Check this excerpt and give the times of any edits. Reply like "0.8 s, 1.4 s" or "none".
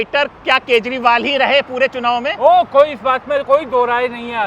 none